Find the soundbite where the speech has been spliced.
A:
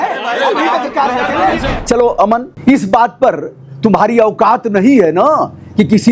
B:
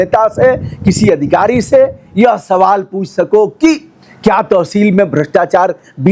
A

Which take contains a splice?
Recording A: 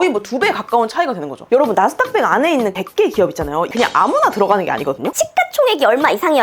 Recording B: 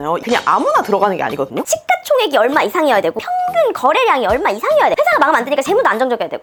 A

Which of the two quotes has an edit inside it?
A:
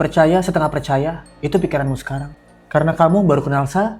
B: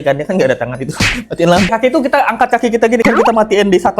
B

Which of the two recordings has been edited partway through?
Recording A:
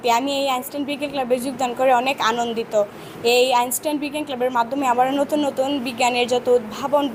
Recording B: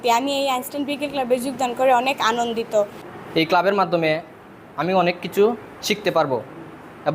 B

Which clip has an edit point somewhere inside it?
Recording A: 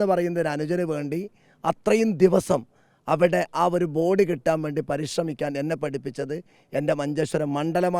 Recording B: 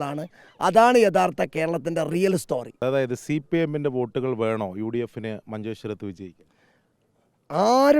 B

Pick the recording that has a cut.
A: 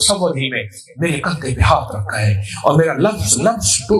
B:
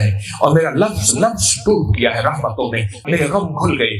B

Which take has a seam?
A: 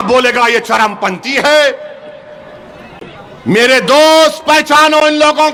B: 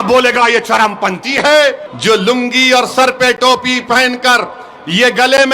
B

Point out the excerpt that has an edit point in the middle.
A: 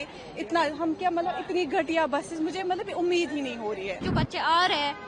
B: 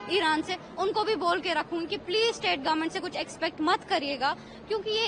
A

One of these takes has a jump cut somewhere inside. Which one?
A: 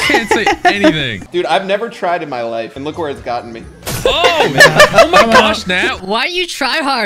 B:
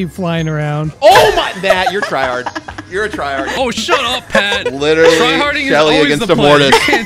B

